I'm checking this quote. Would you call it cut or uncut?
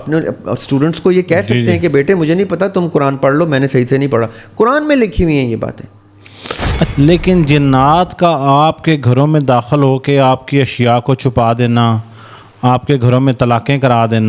cut